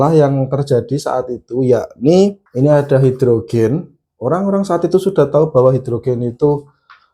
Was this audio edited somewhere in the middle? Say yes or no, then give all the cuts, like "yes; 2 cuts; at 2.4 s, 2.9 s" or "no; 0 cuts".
yes; 1 cut; at 2.4 s